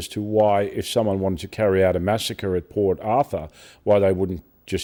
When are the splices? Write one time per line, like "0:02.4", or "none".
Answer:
none